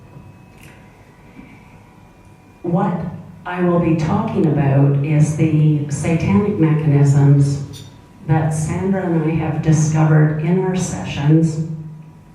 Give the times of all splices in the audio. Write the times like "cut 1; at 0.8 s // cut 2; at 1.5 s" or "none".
cut 1; at 4.1 s